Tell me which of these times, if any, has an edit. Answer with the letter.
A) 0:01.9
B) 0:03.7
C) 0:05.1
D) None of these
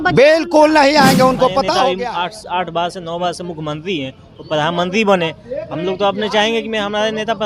A